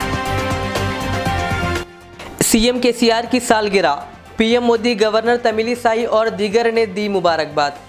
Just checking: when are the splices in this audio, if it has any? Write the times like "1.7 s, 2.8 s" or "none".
1.7 s